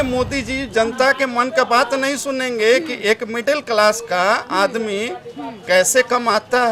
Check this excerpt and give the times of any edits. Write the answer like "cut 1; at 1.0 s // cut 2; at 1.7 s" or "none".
none